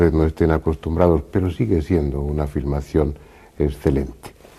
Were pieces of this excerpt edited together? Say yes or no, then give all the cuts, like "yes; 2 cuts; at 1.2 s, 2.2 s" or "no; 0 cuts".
yes; 1 cut; at 2.1 s